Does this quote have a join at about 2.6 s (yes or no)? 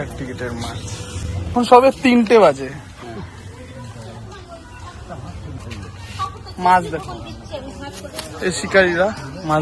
no